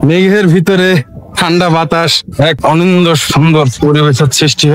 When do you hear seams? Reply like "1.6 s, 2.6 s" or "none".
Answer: 2.5 s, 3.7 s